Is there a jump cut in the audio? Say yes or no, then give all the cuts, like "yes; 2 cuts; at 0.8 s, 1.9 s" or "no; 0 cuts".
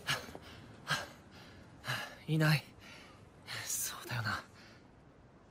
no; 0 cuts